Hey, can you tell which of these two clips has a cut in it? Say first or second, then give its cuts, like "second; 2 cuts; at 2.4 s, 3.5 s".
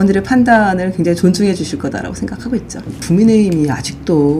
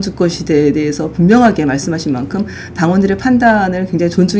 first; 1 cut; at 3.0 s